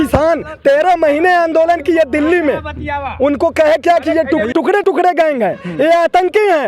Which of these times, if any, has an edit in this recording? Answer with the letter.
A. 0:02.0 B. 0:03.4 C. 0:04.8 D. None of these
C